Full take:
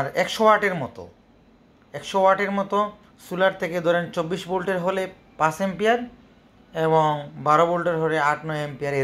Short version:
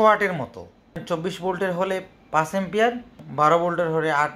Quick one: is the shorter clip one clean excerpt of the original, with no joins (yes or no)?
no